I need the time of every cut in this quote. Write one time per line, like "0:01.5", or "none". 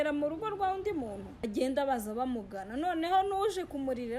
0:01.3